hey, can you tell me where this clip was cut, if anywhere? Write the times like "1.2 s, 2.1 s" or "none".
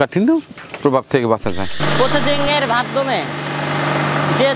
1.8 s

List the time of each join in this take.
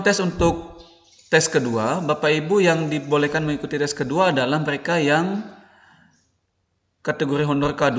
none

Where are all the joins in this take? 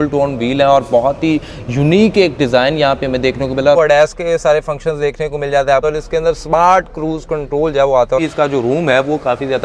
3.8 s, 5.8 s, 8.2 s

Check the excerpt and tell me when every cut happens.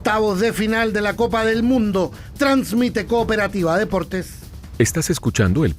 4.5 s

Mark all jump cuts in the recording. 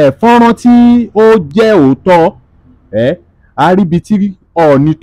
none

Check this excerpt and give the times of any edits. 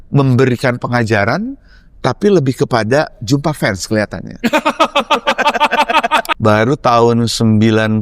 6.3 s

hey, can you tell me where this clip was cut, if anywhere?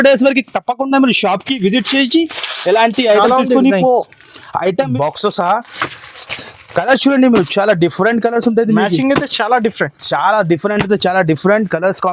4.8 s

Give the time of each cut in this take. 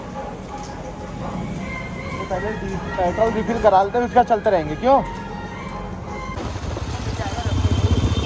none

